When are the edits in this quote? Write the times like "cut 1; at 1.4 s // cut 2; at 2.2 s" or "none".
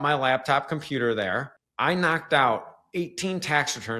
cut 1; at 1.5 s